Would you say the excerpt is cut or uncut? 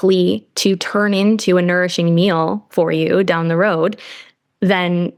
uncut